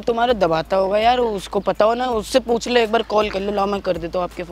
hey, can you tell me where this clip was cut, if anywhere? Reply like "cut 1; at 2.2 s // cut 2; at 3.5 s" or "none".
none